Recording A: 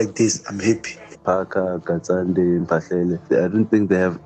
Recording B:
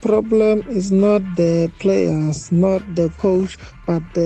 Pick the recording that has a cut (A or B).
A